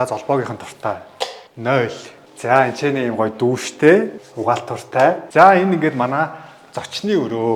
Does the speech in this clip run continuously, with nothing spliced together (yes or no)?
no